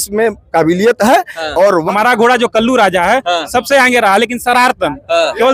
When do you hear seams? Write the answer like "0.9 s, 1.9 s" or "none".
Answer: 1.9 s